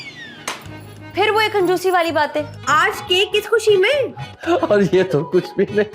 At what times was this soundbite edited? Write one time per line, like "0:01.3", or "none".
0:02.6